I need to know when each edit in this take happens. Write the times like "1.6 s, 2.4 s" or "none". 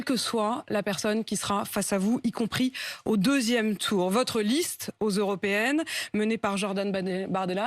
2.8 s